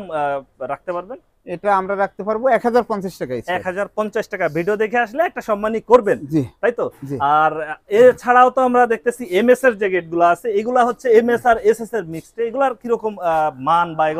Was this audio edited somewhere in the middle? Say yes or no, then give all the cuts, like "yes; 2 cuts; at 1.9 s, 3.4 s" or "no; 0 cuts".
no; 0 cuts